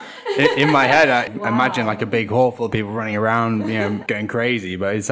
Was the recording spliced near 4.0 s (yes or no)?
yes